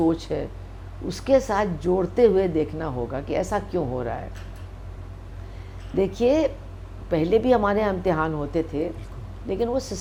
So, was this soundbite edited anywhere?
no; 0 cuts

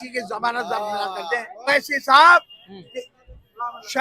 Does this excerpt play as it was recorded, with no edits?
no; 1 cut; at 1.7 s

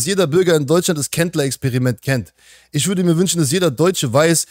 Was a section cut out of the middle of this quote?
no; 0 cuts

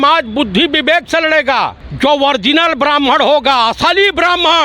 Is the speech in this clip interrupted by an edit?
yes; 1 cut; at 1.8 s

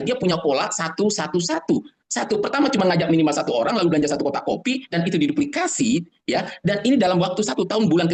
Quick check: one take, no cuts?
yes; 0 cuts

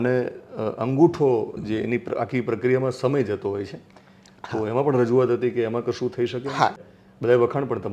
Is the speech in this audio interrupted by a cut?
yes; 1 cut; at 6.8 s

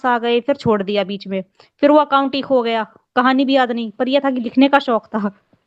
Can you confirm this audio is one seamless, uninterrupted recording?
yes; 0 cuts

